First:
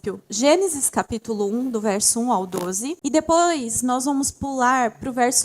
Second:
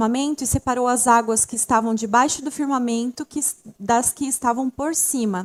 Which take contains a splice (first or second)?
first